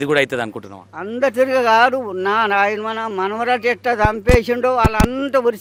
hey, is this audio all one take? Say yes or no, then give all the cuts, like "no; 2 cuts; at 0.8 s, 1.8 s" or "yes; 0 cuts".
yes; 0 cuts